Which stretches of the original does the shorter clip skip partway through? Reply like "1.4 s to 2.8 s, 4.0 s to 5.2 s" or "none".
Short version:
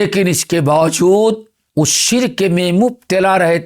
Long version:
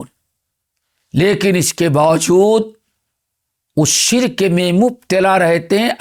2.8 s to 3.5 s